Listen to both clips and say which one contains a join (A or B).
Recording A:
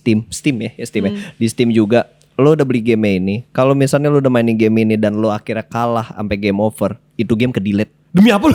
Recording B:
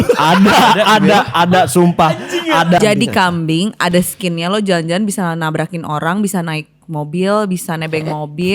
B